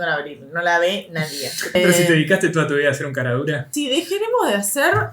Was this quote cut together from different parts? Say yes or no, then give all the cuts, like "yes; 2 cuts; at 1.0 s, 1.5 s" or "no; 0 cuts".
yes; 2 cuts; at 1.7 s, 3.7 s